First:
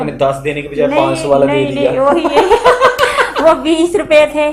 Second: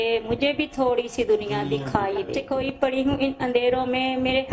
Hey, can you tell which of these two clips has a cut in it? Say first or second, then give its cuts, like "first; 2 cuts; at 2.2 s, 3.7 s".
second; 1 cut; at 2.4 s